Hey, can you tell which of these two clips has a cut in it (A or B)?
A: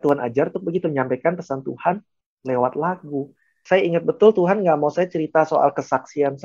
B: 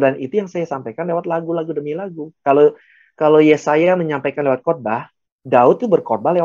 A